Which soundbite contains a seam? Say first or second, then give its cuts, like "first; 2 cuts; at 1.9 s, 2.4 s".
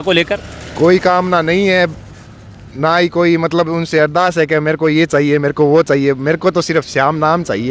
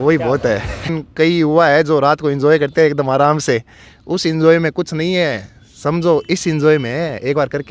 second; 1 cut; at 0.9 s